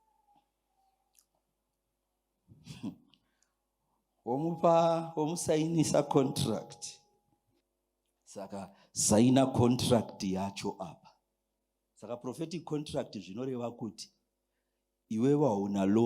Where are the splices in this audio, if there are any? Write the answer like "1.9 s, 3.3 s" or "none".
7.6 s